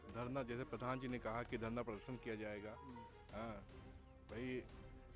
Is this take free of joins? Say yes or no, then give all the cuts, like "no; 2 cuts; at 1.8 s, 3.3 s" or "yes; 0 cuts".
yes; 0 cuts